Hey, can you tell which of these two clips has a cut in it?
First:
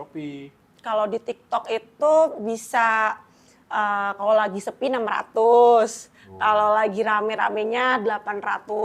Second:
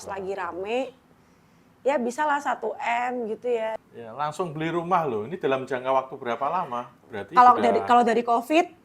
second; 2 cuts; at 3.8 s, 7.0 s

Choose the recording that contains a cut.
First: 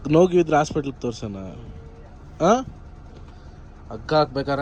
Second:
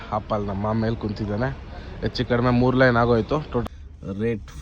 second; 1 cut; at 3.6 s

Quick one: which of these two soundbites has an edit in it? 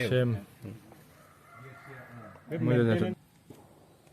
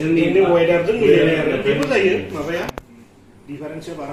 first; 1 cut; at 3.1 s

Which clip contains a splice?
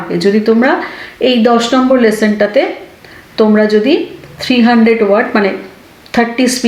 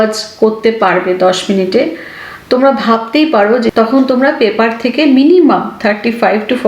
second; 1 cut; at 3.7 s

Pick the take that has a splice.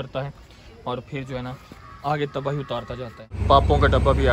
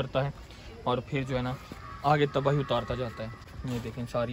first; 1 cut; at 3.4 s

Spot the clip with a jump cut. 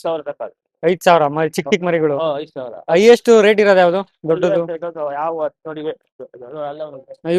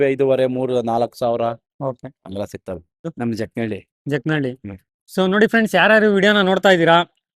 second; 1 cut; at 3.1 s

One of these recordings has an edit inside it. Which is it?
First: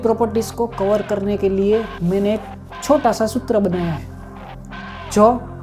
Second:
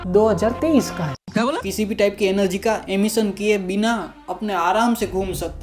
second; 1 cut; at 1.6 s

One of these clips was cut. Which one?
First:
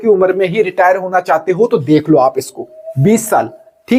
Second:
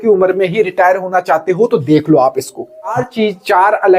second; 1 cut; at 2.9 s

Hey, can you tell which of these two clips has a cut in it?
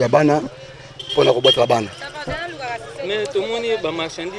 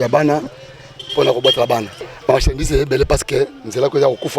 second; 1 cut; at 2.0 s

